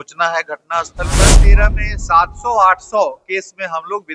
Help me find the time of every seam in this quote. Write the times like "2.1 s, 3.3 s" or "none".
1.4 s

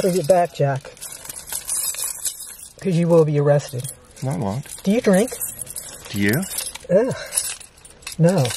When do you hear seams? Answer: none

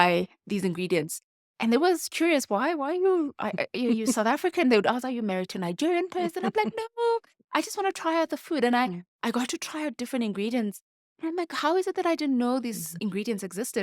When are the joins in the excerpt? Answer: 12.9 s

